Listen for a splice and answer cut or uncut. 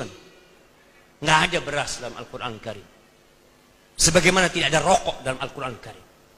uncut